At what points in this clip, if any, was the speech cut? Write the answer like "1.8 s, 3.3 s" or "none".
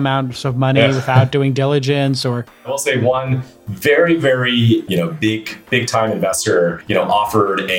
2.7 s, 4.9 s, 6.8 s